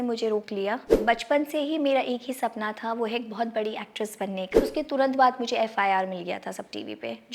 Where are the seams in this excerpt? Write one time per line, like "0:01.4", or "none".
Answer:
0:01.0
0:04.7